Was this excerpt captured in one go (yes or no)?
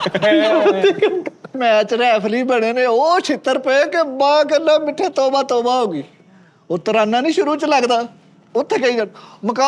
no